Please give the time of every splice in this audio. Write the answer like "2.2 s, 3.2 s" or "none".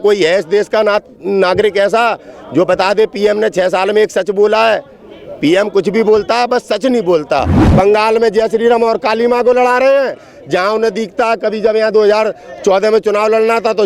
7.6 s

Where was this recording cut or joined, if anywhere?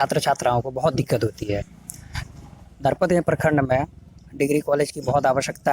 none

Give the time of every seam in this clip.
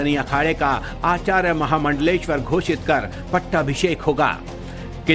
none

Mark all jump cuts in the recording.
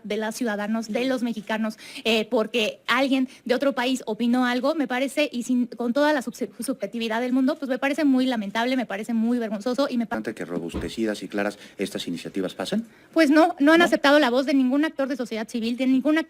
10.1 s

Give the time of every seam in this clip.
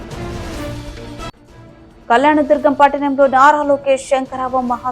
1.3 s

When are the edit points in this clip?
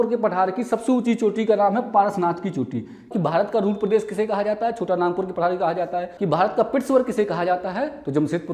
3.1 s, 6.1 s

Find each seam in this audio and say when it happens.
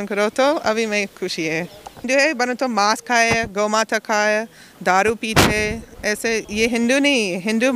2.0 s

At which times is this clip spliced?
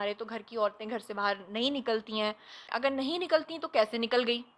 2.7 s

